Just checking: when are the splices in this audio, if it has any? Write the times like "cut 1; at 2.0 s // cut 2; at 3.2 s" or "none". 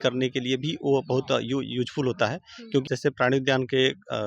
cut 1; at 2.8 s